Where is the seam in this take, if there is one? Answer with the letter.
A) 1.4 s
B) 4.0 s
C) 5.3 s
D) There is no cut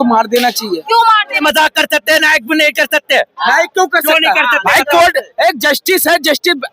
A